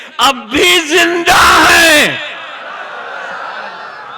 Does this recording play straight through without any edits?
yes; 0 cuts

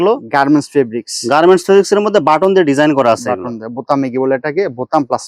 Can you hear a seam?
no; 0 cuts

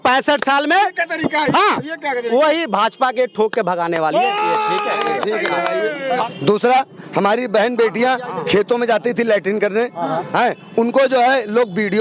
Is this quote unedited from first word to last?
no; 1 cut; at 6.2 s

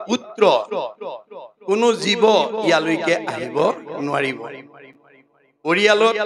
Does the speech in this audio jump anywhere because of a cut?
no; 0 cuts

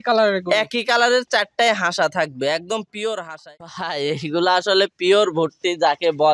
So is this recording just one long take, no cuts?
no; 2 cuts; at 3.3 s, 4.5 s

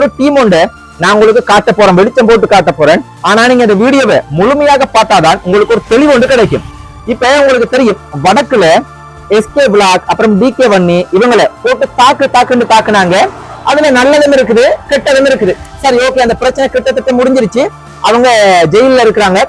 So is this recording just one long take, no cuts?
yes; 0 cuts

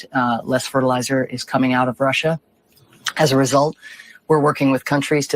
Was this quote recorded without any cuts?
yes; 0 cuts

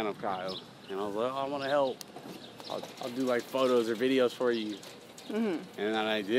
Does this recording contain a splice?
no; 0 cuts

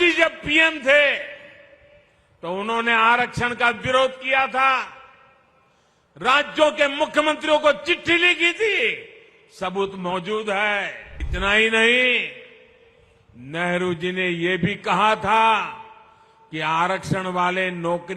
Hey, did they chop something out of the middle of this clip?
yes; 1 cut; at 11.2 s

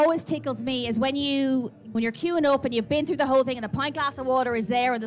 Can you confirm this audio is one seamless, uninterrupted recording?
no; 1 cut; at 1.9 s

